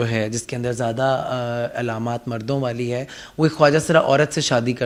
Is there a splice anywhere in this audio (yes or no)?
no